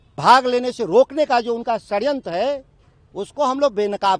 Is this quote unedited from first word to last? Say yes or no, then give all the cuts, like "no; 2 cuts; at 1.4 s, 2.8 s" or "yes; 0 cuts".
yes; 0 cuts